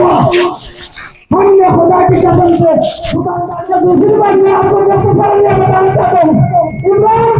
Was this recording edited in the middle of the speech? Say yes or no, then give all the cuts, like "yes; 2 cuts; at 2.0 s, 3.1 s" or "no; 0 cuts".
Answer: yes; 1 cut; at 3.3 s